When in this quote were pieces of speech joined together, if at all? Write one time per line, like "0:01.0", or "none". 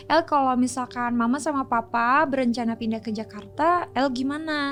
none